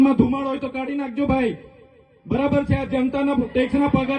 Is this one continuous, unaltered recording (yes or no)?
yes